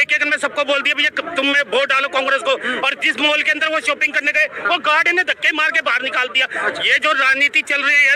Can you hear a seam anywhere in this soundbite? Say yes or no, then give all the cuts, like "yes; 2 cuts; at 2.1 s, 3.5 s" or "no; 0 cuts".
no; 0 cuts